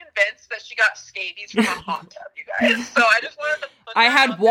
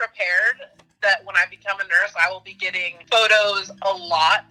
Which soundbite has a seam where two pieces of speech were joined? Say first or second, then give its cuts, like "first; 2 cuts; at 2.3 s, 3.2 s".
second; 1 cut; at 2.9 s